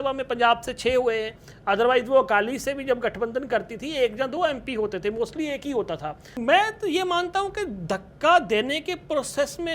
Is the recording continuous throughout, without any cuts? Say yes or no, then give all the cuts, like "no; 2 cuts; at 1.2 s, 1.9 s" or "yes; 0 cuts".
no; 1 cut; at 6.2 s